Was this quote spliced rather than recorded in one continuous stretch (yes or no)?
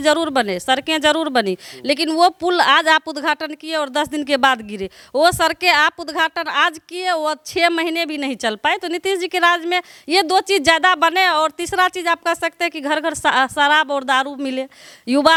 no